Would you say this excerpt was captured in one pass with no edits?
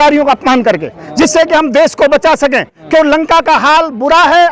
no; 1 cut; at 1.0 s

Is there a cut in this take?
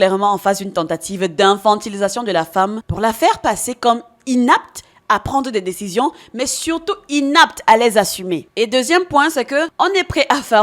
yes; 2 cuts; at 2.8 s, 9.7 s

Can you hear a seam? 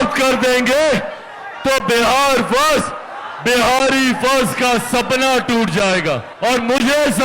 yes; 1 cut; at 6.3 s

